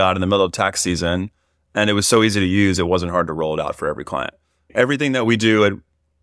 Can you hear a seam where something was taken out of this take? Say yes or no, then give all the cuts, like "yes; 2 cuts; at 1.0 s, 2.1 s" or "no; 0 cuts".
yes; 1 cut; at 4.7 s